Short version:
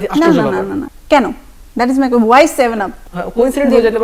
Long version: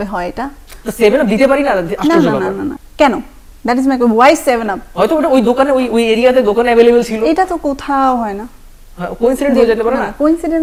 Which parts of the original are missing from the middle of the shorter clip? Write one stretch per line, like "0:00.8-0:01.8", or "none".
0:04.8-0:08.7